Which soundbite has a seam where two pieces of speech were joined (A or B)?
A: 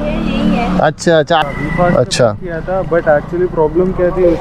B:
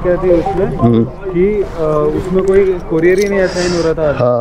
A